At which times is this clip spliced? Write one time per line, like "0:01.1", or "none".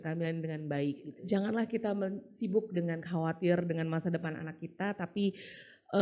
0:01.1